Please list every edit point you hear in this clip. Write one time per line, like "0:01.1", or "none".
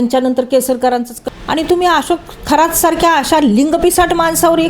0:01.1